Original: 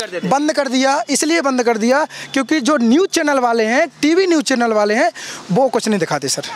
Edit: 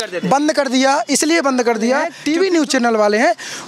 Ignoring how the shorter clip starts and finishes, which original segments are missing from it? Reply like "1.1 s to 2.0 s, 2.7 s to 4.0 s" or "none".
2.1 s to 3.9 s

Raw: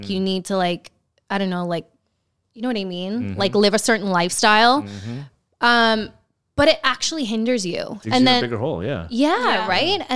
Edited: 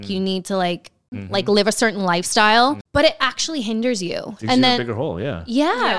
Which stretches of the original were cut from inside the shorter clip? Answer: 1.2 s to 3.3 s, 4.9 s to 6.5 s

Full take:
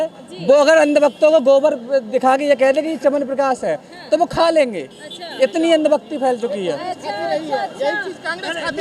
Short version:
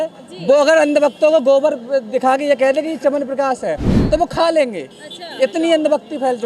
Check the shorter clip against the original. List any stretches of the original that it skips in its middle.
none

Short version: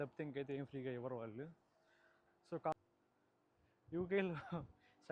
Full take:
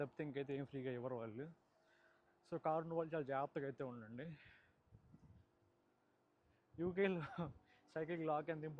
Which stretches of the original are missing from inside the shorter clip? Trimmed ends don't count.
2.7 s to 5.6 s

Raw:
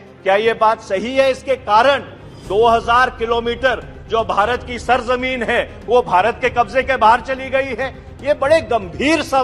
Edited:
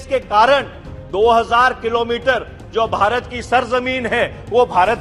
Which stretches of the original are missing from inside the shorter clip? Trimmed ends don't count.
none

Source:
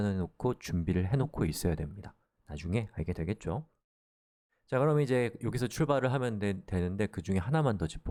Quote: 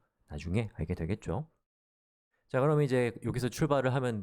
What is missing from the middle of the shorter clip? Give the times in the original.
none

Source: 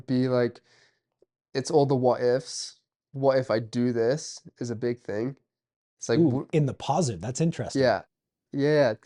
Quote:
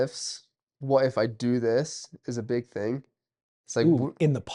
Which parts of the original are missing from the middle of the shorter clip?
none

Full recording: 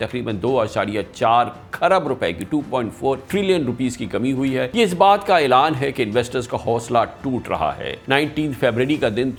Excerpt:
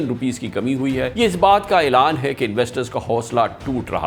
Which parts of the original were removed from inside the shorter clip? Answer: none

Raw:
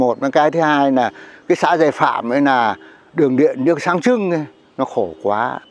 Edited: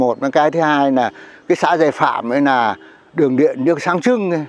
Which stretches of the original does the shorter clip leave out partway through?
none

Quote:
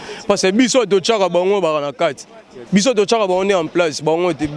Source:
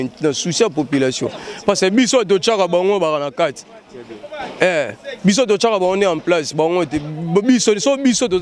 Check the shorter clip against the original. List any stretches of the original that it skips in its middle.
3.9 s to 5.0 s

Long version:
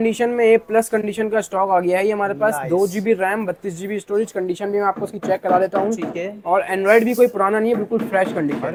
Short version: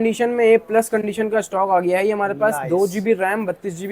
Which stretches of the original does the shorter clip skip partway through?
none

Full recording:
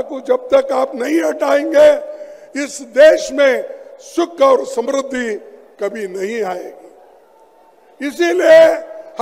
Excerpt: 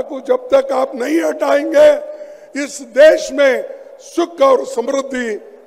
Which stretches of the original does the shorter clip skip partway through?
none

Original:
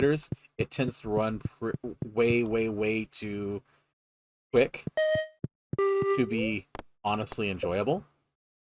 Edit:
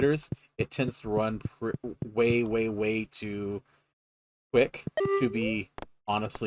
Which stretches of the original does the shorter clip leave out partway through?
5.0 s to 6.0 s

